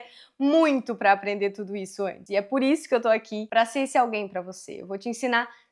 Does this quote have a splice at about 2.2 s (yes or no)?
yes